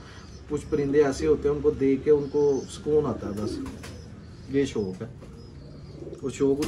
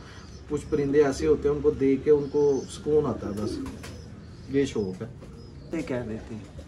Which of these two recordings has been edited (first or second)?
second